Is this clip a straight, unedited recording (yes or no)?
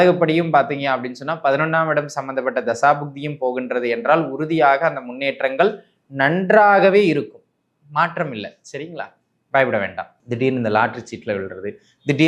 no